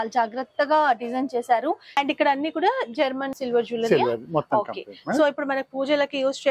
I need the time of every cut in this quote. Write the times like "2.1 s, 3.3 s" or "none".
2.0 s, 3.3 s